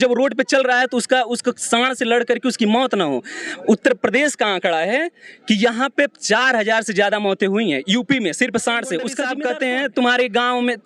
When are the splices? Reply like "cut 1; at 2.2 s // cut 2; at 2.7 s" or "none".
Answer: cut 1; at 9.4 s